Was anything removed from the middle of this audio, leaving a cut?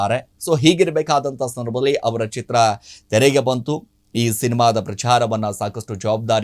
no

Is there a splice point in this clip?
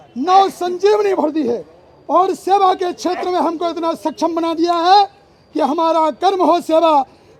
no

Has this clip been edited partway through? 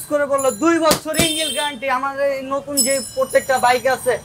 no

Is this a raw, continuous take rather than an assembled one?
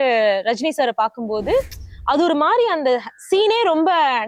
yes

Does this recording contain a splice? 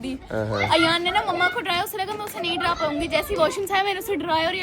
no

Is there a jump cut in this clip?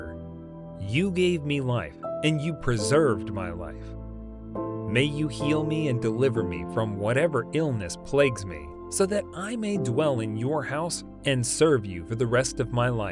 no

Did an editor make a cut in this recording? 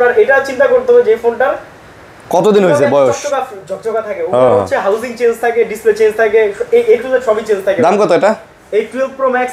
no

